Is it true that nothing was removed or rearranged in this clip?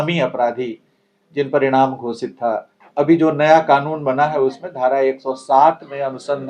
no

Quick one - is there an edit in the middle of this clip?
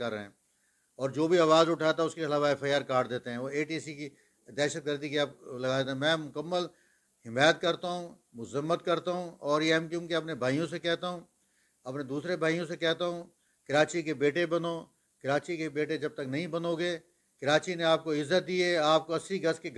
no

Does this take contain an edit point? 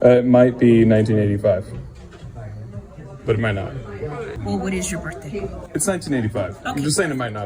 yes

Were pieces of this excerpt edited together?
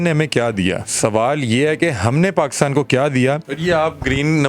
yes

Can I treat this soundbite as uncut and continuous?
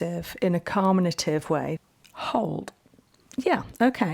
no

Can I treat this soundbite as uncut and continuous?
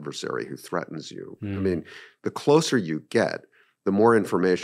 yes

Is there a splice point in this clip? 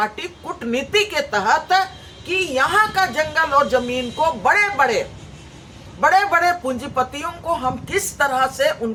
no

